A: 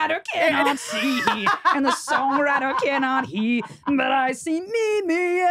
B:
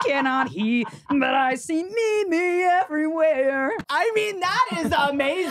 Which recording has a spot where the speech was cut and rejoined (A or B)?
B